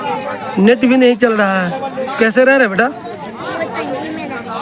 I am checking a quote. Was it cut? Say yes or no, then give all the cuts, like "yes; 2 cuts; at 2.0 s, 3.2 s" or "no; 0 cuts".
no; 0 cuts